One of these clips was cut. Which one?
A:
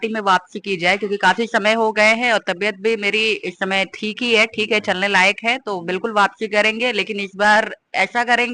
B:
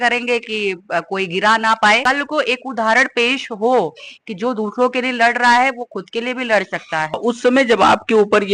B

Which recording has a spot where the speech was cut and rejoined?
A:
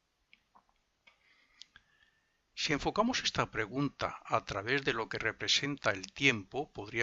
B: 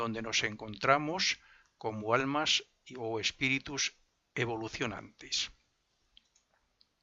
A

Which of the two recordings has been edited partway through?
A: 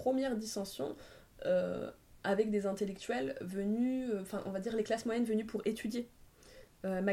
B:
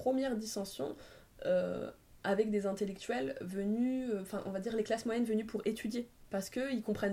B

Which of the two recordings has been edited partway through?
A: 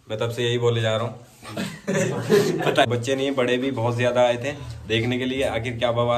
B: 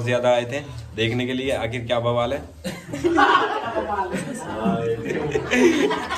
A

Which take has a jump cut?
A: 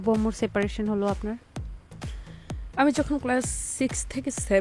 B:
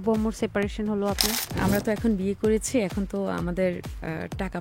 B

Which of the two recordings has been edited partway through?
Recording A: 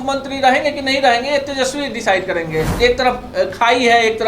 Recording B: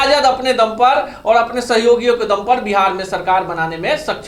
A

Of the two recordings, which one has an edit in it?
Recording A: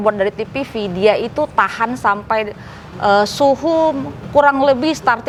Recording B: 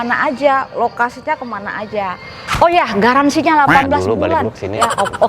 B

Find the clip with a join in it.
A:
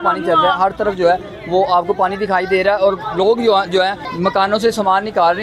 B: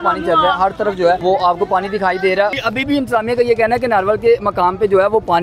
B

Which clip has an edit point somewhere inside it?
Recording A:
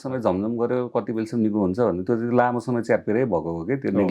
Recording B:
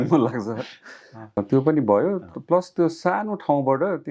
B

